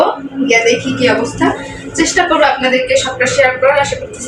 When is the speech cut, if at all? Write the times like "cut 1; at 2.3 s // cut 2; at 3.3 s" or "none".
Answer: none